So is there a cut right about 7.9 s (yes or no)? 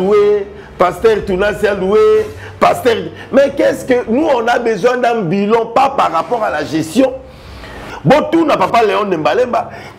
yes